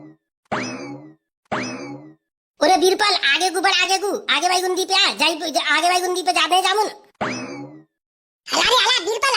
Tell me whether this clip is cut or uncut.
uncut